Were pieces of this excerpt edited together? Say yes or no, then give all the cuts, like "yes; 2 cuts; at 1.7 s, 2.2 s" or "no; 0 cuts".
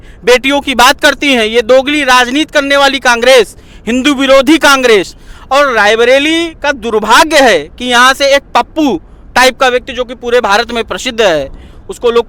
no; 0 cuts